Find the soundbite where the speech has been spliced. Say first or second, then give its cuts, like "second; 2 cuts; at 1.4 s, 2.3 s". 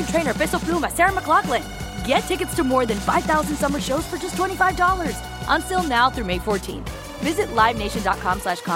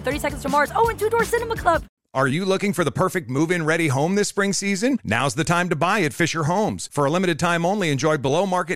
second; 1 cut; at 2.0 s